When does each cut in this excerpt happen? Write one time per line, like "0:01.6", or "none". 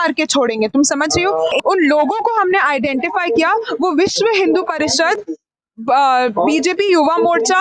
0:01.6